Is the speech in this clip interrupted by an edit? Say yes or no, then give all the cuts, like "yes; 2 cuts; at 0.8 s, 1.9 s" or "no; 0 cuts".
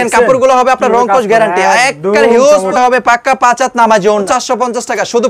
yes; 2 cuts; at 2.7 s, 4.3 s